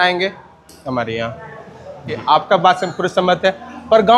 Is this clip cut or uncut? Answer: cut